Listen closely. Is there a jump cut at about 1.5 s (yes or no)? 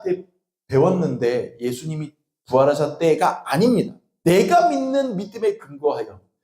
no